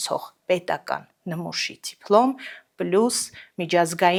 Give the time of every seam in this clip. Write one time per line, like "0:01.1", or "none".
none